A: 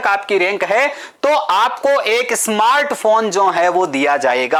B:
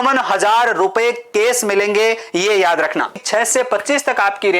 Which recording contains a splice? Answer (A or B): B